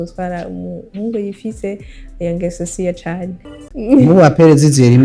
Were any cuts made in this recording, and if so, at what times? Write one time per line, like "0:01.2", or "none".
0:03.5